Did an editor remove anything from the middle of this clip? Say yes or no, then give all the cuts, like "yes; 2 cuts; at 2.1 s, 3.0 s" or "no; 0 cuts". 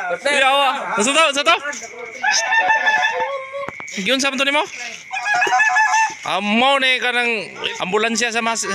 yes; 1 cut; at 7.6 s